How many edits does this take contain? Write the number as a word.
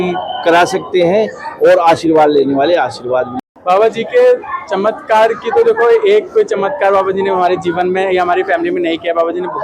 one